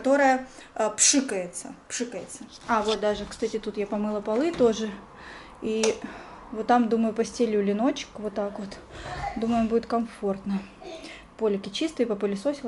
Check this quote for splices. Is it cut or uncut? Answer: uncut